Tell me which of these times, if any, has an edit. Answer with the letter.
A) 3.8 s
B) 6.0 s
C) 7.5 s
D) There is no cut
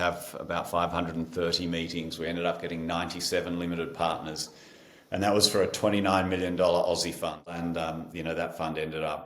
C